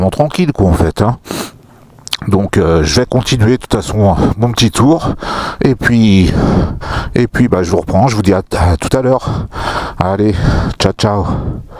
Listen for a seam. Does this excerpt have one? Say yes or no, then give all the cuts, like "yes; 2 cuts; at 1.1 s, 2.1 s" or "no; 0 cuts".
no; 0 cuts